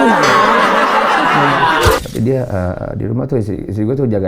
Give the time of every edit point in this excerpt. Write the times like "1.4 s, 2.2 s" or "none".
2.0 s